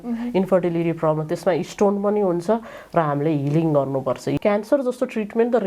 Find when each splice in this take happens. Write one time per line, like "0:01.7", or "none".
0:04.3